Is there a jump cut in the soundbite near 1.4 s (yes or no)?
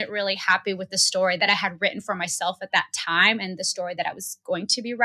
yes